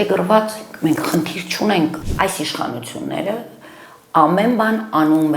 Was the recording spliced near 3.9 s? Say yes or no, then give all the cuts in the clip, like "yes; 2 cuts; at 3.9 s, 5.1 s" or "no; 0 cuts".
no; 1 cut; at 2.0 s